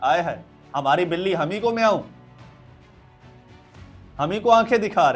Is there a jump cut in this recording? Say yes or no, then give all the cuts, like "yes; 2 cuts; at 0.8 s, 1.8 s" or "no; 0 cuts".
no; 0 cuts